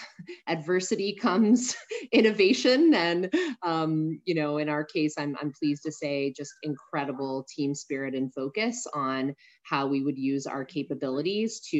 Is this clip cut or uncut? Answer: uncut